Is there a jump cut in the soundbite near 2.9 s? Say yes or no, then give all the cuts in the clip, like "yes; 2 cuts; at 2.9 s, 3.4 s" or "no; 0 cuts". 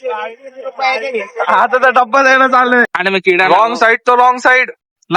yes; 1 cut; at 2.9 s